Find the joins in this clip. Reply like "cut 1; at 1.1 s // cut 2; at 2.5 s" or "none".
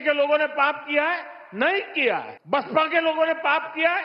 cut 1; at 2.4 s